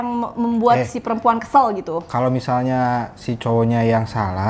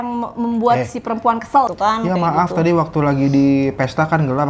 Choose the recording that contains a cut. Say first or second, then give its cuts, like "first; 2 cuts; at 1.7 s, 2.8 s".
second; 1 cut; at 1.7 s